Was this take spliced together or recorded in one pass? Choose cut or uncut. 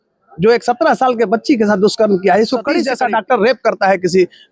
cut